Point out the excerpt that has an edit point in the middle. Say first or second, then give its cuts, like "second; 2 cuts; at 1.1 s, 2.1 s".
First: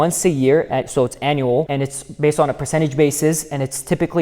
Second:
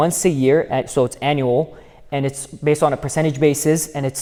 first; 1 cut; at 1.7 s